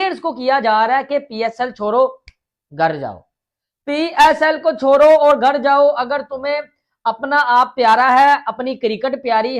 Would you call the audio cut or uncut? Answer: uncut